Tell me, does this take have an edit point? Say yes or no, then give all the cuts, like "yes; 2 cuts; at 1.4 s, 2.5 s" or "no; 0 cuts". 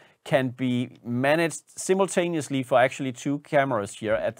no; 0 cuts